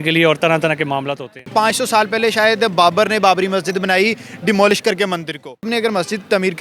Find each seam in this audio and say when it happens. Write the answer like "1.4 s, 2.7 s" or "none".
1.4 s, 5.7 s